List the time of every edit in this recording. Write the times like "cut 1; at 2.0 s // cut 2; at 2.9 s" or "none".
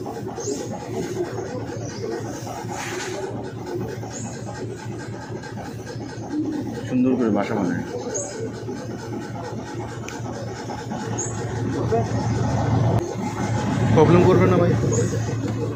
none